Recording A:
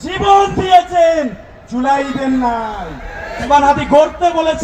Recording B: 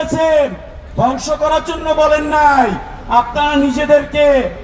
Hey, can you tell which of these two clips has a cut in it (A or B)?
A